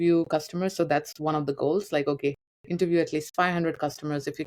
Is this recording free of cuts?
yes; 0 cuts

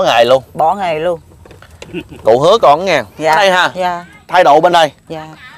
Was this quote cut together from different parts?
yes; 1 cut; at 3.4 s

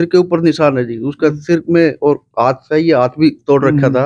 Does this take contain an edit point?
no; 0 cuts

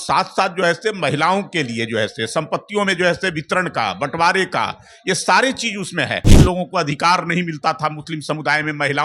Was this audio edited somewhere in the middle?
yes; 1 cut; at 6.4 s

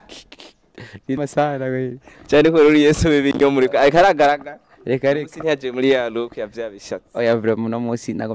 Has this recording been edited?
yes; 1 cut; at 1.2 s

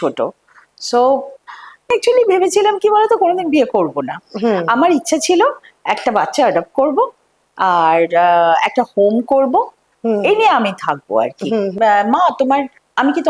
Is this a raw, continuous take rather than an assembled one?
no; 2 cuts; at 1.9 s, 11.7 s

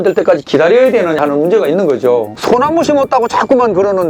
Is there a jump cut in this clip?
yes; 1 cut; at 2.4 s

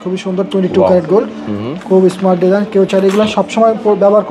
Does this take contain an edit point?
no; 0 cuts

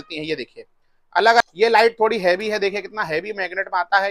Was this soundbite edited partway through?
yes; 1 cut; at 1.4 s

